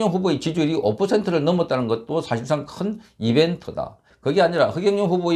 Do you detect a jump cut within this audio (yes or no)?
yes